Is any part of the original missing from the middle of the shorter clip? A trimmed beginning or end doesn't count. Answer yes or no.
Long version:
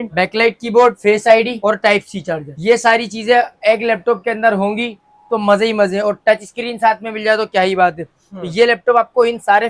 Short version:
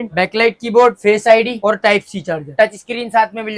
yes